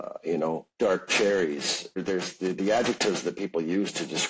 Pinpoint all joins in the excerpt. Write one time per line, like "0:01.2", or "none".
0:02.0